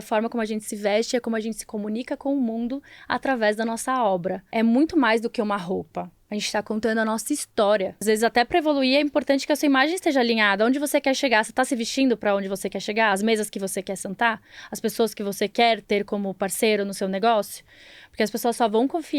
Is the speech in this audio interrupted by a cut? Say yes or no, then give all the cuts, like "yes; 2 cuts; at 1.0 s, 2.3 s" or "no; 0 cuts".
yes; 2 cuts; at 4.4 s, 8.0 s